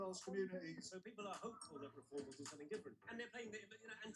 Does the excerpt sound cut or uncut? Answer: cut